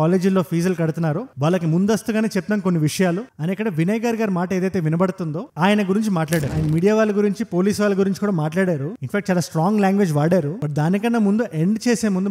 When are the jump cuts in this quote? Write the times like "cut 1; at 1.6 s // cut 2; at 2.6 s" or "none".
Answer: cut 1; at 3.3 s // cut 2; at 6.5 s